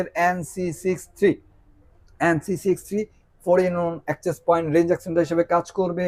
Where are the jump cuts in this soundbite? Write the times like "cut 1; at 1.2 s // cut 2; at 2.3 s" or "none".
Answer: none